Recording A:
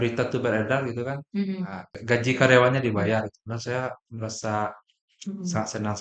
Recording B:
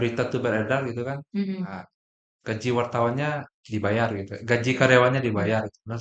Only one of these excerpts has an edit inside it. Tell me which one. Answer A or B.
A